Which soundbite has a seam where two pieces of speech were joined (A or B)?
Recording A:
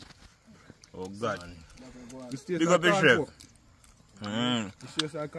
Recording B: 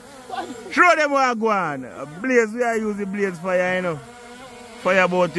A